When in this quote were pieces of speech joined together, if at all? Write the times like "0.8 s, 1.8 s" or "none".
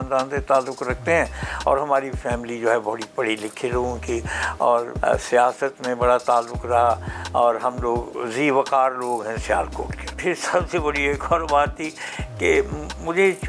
4.9 s, 10.2 s